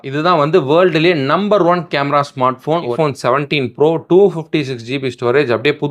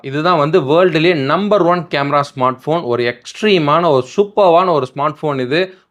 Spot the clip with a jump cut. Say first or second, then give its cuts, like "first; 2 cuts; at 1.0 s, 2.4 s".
first; 1 cut; at 2.9 s